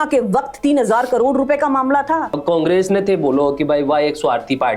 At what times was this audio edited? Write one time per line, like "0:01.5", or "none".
0:02.4